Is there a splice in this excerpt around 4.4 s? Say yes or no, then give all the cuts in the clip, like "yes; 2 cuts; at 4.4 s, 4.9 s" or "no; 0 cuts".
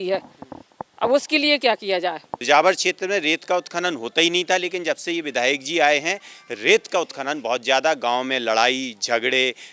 no; 1 cut; at 2.4 s